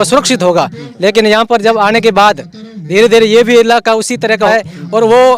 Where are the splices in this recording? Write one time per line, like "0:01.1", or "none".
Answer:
0:04.5

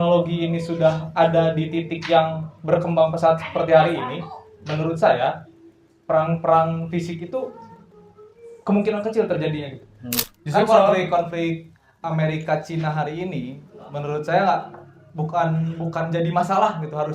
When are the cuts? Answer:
0:10.3

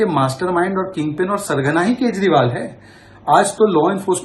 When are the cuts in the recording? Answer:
none

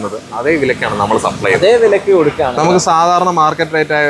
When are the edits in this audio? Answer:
0:02.6

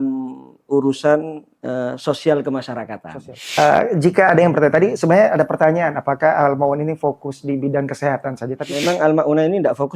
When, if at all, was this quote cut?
0:03.6
0:08.7

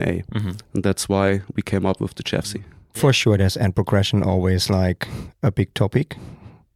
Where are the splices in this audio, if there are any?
0:02.8

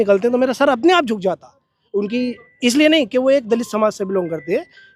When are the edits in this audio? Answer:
none

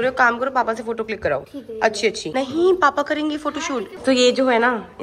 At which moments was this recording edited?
none

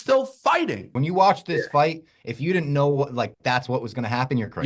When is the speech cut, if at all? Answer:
0:00.9

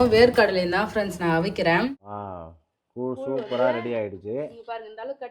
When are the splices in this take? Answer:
0:01.9

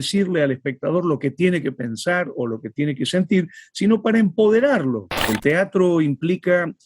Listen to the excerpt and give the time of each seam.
0:05.1

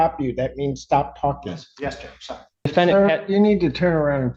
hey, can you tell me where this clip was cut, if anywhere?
0:02.7

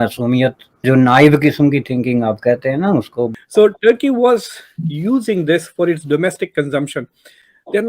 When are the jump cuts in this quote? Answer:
0:03.3

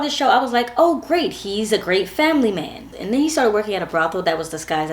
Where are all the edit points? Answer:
0:02.8

